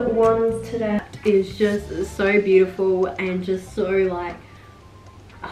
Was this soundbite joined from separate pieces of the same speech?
yes; 1 cut; at 1.0 s

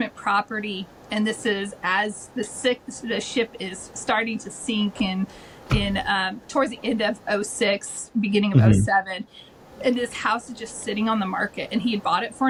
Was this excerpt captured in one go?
yes; 0 cuts

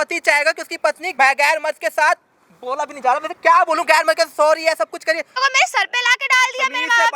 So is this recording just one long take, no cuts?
no; 2 cuts; at 1.1 s, 5.3 s

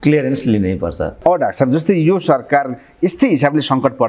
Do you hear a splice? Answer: yes; 1 cut; at 1.1 s

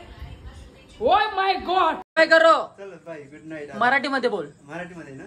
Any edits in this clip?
yes; 1 cut; at 2.0 s

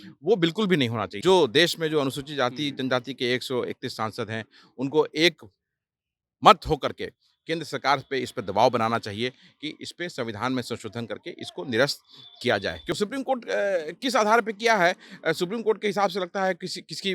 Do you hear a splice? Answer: yes; 2 cuts; at 1.1 s, 13.0 s

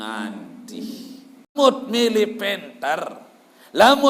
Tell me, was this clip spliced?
yes; 1 cut; at 1.5 s

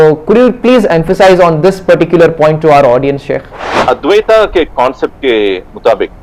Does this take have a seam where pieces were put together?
yes; 1 cut; at 3.8 s

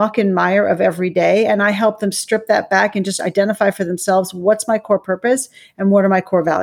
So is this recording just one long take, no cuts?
yes; 0 cuts

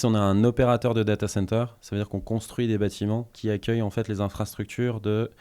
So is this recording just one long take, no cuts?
yes; 0 cuts

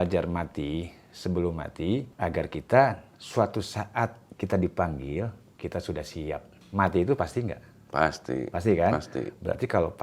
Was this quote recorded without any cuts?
no; 4 cuts; at 2.1 s, 4.2 s, 5.4 s, 6.5 s

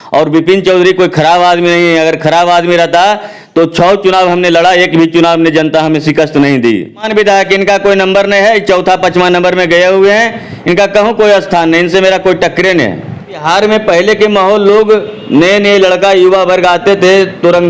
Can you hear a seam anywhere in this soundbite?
yes; 2 cuts; at 7.1 s, 13.4 s

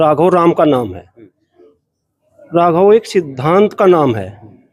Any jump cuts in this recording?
no; 0 cuts

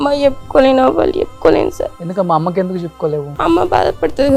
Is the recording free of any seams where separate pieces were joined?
no; 2 cuts; at 2.0 s, 3.3 s

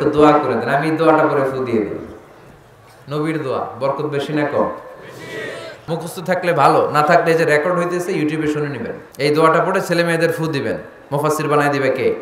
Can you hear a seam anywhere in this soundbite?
yes; 2 cuts; at 5.8 s, 9.0 s

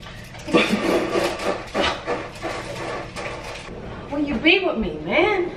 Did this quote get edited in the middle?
yes; 1 cut; at 3.7 s

